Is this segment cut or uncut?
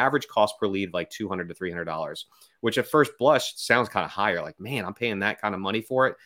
uncut